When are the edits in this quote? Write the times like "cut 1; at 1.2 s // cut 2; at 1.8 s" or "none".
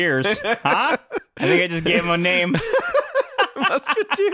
none